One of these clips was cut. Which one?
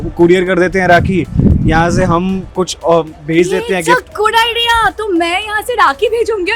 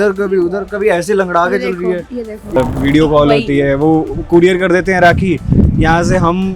second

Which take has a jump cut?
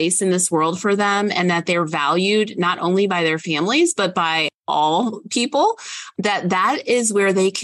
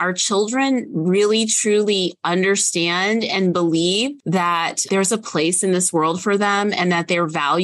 second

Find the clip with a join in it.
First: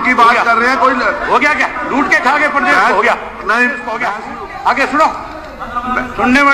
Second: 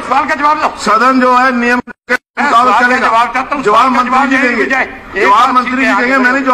first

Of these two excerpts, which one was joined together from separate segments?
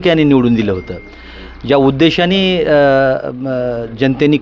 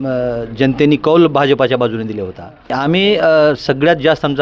second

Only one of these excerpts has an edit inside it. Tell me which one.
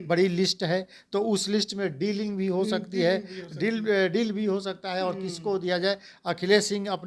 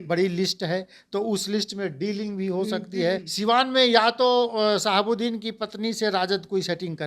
second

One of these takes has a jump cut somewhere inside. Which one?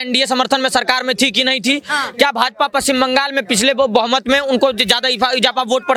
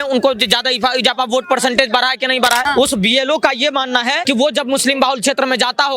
second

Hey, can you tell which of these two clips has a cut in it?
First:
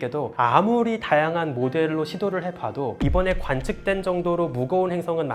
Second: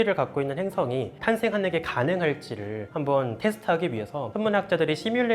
second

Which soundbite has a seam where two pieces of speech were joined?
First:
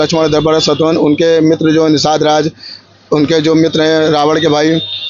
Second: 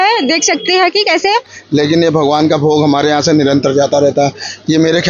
second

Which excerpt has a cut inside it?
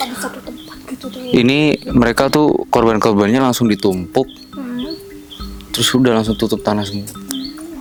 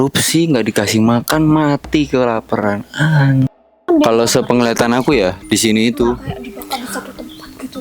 second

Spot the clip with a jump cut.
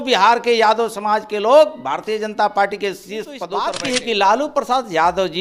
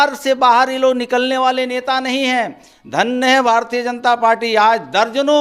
first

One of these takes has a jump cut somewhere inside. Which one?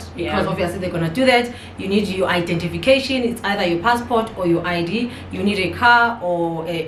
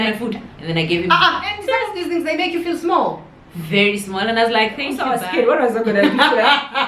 second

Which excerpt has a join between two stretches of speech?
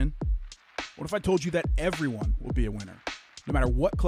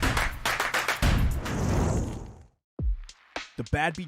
second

